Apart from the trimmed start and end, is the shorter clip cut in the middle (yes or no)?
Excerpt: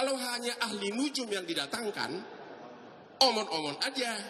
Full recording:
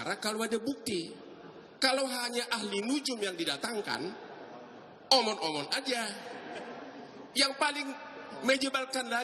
no